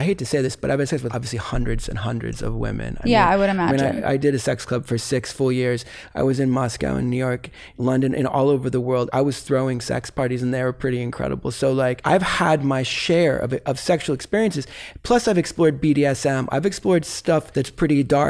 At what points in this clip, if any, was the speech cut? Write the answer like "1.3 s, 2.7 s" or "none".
1.1 s, 12.0 s, 17.5 s